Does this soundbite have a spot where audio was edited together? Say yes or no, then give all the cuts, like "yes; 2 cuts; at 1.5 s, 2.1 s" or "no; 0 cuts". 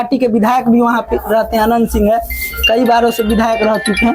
no; 0 cuts